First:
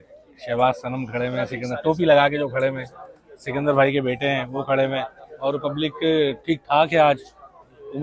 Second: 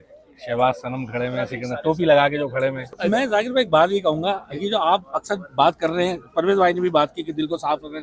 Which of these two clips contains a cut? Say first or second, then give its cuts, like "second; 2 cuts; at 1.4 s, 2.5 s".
second; 1 cut; at 3.0 s